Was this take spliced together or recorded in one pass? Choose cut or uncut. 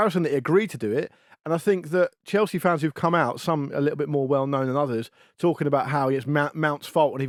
uncut